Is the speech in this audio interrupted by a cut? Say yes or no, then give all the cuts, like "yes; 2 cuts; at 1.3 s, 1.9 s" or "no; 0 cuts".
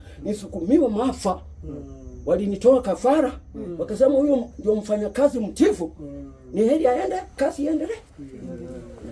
no; 0 cuts